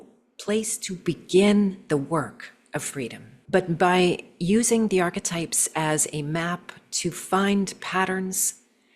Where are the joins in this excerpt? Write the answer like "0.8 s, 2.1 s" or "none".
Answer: 3.3 s